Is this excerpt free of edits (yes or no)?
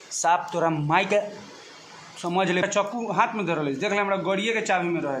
no